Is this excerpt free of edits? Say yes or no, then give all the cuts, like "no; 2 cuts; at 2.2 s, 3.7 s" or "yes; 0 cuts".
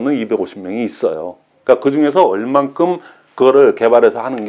yes; 0 cuts